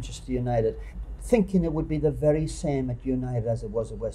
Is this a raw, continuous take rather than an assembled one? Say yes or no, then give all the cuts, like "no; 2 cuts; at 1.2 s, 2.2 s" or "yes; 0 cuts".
no; 1 cut; at 0.9 s